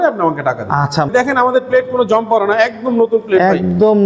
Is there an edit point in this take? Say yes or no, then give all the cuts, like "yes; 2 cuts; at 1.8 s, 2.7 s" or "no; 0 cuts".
yes; 1 cut; at 1.1 s